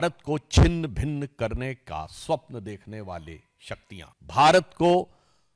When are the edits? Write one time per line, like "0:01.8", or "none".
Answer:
0:04.1